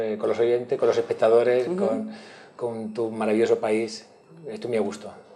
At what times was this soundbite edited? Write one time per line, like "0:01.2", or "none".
0:04.1